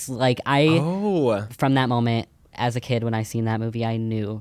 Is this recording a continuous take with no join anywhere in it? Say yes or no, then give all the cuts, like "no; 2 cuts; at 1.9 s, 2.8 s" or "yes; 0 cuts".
no; 1 cut; at 1.5 s